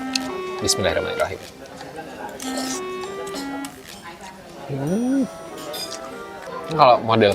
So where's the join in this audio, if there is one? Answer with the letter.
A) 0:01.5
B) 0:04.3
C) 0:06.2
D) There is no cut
C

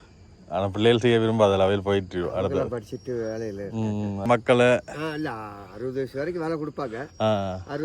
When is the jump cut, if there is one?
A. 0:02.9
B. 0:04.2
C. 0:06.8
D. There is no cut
B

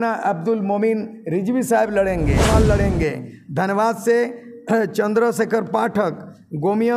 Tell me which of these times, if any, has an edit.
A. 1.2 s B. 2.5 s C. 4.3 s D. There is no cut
B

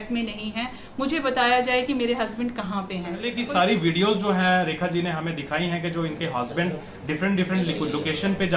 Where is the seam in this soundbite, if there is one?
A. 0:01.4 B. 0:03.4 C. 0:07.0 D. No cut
B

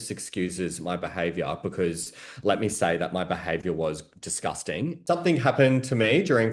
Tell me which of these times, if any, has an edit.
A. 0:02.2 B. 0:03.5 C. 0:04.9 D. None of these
C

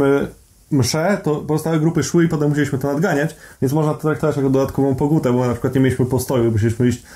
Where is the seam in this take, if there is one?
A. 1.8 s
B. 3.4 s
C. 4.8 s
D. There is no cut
D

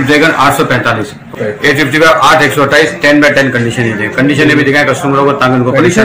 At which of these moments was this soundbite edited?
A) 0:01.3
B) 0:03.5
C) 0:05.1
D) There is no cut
A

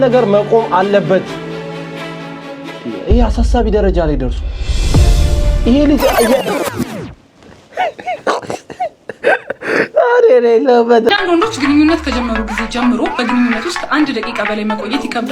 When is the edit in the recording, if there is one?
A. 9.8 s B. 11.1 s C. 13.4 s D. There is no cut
B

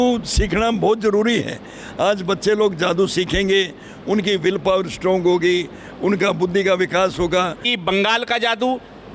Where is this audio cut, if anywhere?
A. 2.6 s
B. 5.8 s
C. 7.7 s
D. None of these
C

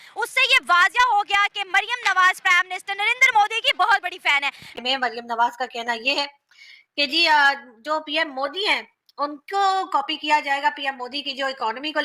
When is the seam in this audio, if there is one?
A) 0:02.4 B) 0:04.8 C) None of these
B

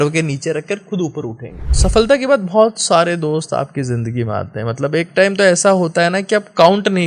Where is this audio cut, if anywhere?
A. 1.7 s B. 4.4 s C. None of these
A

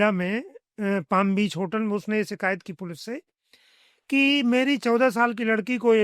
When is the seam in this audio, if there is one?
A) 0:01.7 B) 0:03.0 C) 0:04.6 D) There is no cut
D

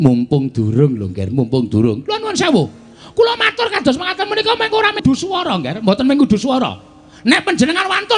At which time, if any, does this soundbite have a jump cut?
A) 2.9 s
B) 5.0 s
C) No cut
B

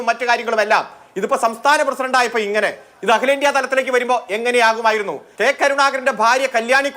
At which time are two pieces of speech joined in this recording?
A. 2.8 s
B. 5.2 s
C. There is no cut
B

